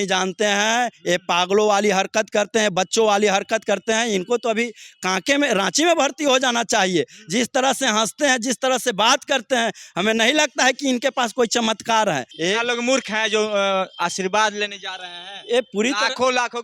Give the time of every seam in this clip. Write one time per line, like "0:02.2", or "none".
0:12.3